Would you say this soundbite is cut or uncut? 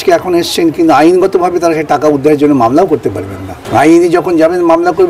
cut